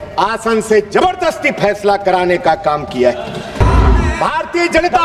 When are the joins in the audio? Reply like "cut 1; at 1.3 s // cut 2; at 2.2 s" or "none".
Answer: cut 1; at 3.7 s